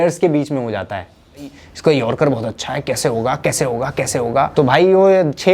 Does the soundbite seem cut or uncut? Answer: cut